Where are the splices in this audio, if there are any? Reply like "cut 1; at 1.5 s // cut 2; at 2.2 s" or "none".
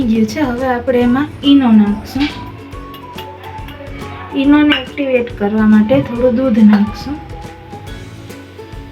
cut 1; at 7.2 s